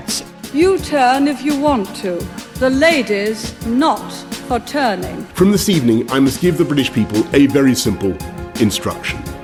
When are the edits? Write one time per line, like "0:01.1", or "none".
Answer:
none

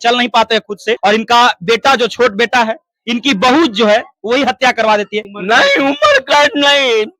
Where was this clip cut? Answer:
0:01.0
0:05.3

